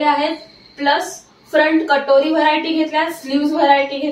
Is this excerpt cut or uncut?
uncut